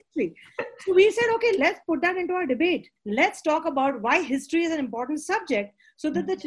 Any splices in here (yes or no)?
yes